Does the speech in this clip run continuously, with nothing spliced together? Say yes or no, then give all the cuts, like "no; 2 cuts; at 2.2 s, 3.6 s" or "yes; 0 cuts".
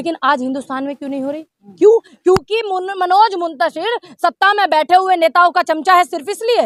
yes; 0 cuts